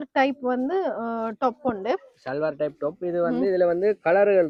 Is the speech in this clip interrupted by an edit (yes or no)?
no